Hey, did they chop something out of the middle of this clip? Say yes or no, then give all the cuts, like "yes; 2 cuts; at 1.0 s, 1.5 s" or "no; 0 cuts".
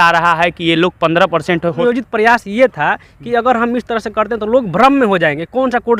yes; 1 cut; at 1.8 s